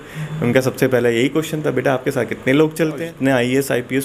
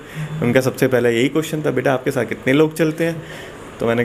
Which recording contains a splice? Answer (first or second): first